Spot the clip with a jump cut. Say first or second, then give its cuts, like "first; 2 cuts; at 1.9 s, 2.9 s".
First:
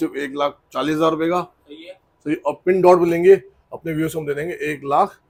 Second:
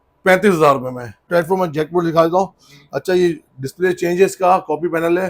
second; 1 cut; at 1.2 s